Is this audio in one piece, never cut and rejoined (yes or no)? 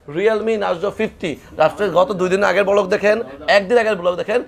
yes